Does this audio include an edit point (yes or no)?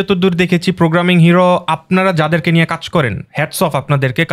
no